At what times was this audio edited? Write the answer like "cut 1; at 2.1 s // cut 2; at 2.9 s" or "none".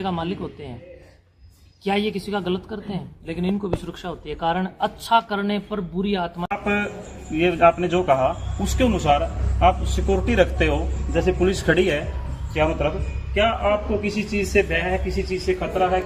cut 1; at 6.5 s